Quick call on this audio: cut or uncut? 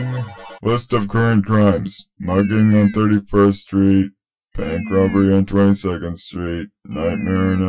uncut